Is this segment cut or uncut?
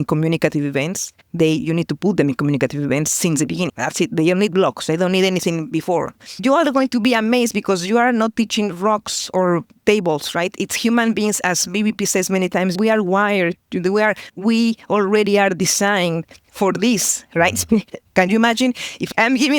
cut